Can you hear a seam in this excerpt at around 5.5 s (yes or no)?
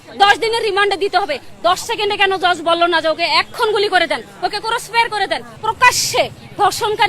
yes